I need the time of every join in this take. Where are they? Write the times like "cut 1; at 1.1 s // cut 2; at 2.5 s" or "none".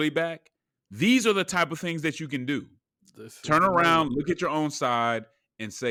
none